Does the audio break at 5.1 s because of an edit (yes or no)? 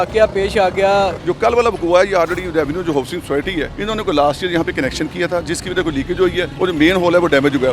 no